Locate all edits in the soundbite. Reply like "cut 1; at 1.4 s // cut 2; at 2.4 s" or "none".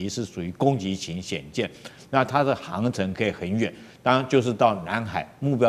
none